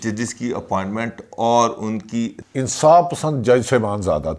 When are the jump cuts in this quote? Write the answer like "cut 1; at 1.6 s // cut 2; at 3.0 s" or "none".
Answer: cut 1; at 2.4 s